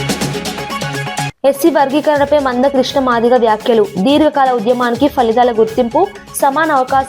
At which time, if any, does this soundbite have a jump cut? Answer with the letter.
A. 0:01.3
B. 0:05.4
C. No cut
A